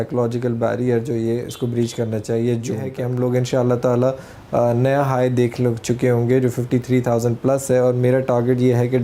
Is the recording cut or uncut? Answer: cut